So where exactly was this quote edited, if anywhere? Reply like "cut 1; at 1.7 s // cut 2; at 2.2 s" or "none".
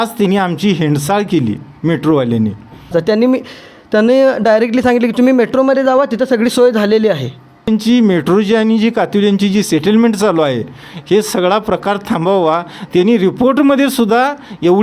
cut 1; at 2.9 s // cut 2; at 7.7 s